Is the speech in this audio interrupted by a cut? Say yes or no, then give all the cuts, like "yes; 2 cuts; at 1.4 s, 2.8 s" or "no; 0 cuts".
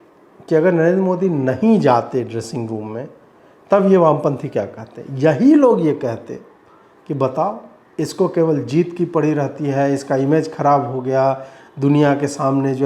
no; 0 cuts